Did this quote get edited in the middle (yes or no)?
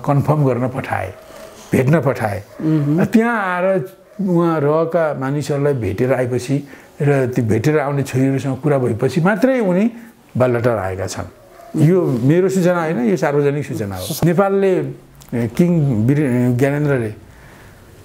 yes